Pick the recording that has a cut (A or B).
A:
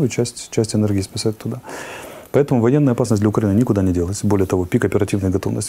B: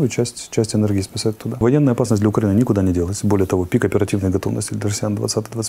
B